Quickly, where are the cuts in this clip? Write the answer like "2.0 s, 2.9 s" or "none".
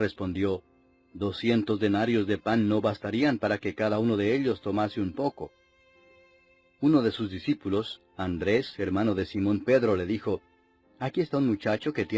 7.4 s